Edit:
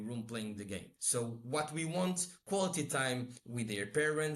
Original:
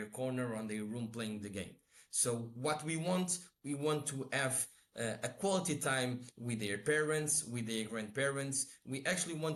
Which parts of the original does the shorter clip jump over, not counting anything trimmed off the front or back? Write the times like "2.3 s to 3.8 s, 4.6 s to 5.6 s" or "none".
1.8 s to 2.1 s, 3.5 s to 5.3 s